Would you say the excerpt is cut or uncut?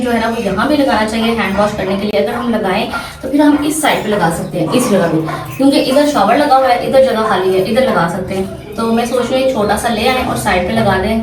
uncut